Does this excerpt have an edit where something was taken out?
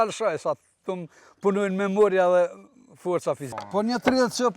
yes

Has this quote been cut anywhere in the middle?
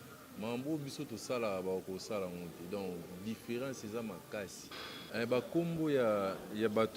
yes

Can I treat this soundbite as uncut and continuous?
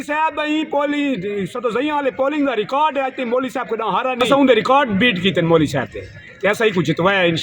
no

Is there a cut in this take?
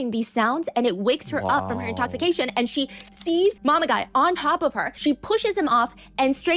yes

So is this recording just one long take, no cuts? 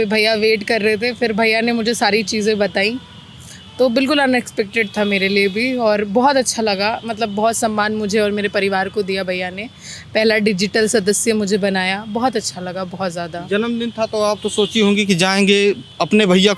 yes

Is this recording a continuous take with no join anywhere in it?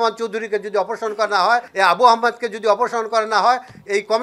no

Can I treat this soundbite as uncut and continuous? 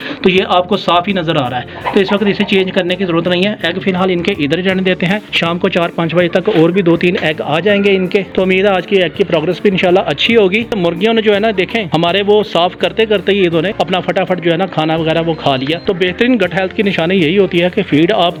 yes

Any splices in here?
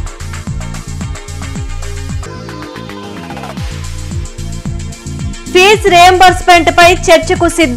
yes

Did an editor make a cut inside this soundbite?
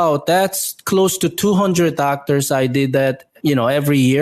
yes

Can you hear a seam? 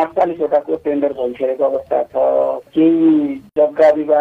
yes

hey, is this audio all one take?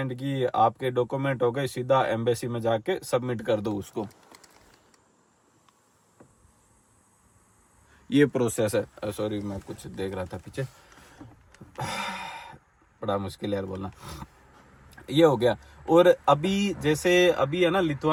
yes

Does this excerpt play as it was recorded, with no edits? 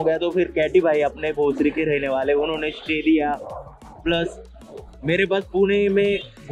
yes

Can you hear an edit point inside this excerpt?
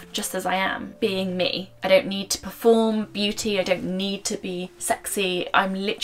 yes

